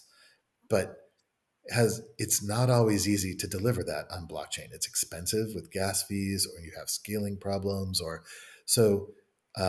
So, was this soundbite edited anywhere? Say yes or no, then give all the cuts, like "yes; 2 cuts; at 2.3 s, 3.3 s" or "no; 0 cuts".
no; 0 cuts